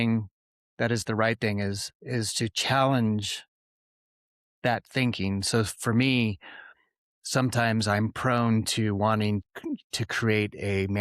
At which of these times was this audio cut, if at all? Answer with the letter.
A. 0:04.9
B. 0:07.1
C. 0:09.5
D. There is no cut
C